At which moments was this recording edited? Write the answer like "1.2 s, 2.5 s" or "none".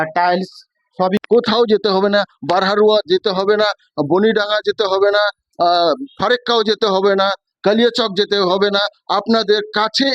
1.2 s